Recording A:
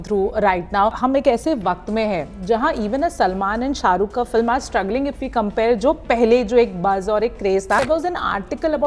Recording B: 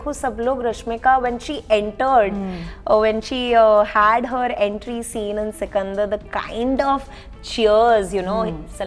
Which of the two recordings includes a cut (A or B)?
A